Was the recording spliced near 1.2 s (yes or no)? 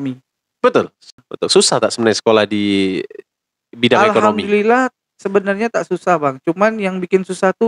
yes